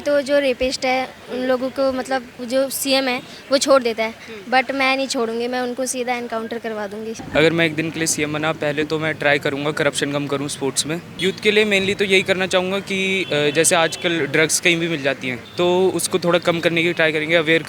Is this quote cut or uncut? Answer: cut